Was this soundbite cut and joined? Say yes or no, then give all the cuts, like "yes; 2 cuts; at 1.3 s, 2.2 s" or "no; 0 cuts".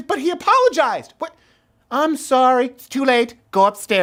no; 0 cuts